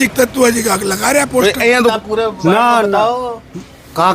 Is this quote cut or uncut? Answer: cut